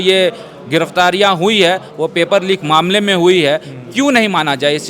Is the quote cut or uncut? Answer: uncut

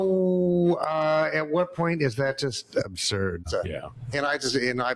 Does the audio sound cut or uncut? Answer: cut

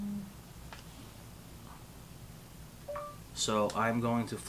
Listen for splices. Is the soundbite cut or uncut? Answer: uncut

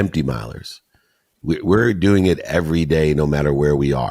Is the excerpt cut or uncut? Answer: uncut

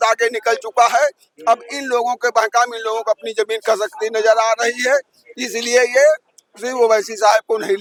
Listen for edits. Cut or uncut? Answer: uncut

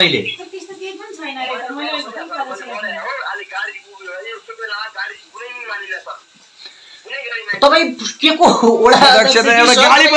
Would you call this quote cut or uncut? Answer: uncut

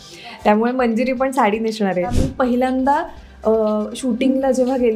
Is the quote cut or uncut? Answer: cut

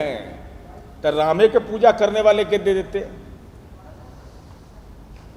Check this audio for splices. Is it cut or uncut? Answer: uncut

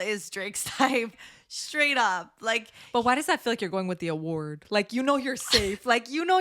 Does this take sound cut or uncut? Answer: cut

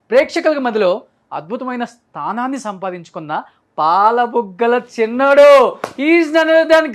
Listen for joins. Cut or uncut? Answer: uncut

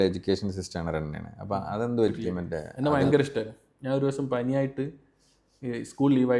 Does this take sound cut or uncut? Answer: cut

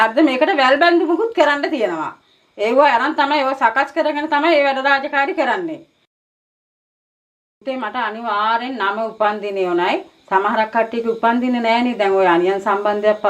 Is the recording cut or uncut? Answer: uncut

